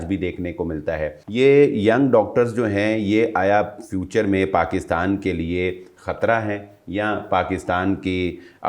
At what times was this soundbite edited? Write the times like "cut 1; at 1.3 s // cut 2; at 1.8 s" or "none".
cut 1; at 1.2 s

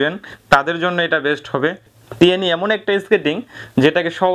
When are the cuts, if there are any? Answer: cut 1; at 1.9 s

